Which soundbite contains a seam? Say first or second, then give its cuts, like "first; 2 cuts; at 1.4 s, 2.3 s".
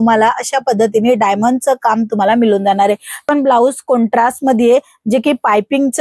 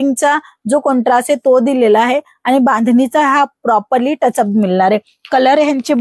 first; 1 cut; at 3.3 s